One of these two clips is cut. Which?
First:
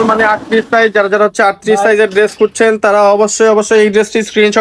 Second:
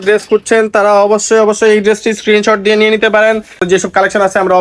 second; 1 cut; at 3.6 s

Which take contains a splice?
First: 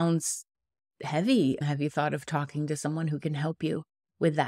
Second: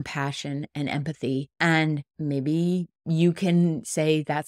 second; 3 cuts; at 1.5 s, 2.1 s, 2.9 s

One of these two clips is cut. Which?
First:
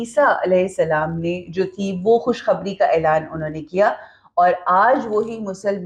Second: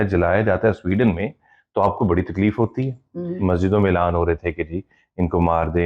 second; 1 cut; at 3.4 s

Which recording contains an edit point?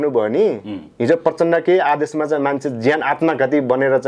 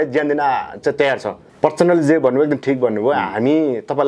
second; 1 cut; at 1.4 s

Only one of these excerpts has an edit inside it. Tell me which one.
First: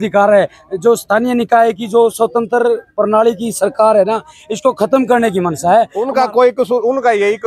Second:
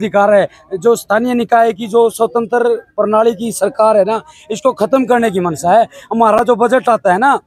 first; 1 cut; at 6.0 s

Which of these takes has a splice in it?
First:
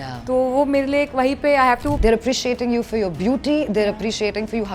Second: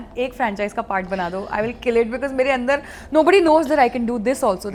first; 1 cut; at 2.0 s

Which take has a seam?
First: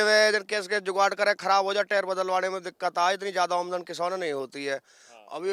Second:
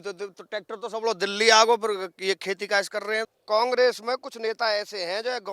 second; 1 cut; at 3.3 s

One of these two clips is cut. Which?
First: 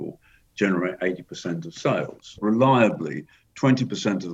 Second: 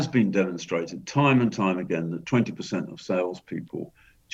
first; 1 cut; at 2.3 s

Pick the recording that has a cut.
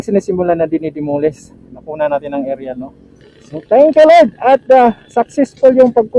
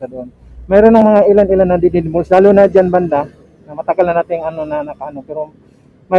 first; 1 cut; at 3.6 s

